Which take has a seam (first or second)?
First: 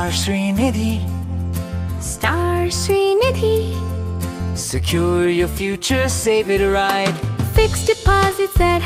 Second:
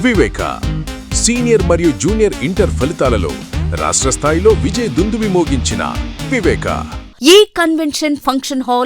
second